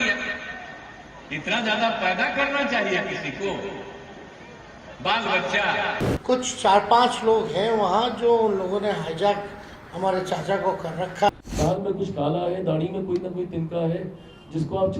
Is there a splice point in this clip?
yes; 2 cuts; at 6.1 s, 11.3 s

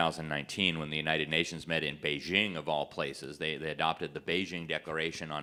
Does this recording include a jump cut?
no; 0 cuts

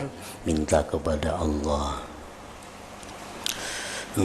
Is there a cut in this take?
no; 0 cuts

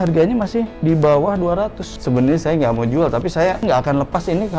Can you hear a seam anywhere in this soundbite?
yes; 1 cut; at 1.9 s

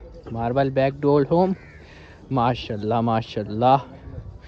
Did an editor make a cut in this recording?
no; 0 cuts

